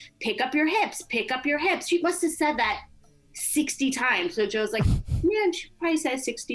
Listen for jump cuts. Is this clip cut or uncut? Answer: uncut